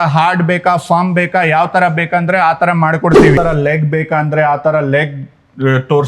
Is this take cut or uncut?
cut